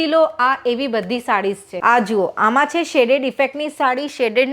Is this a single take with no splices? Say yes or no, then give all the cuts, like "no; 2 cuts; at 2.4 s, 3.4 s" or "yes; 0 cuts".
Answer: no; 1 cut; at 1.7 s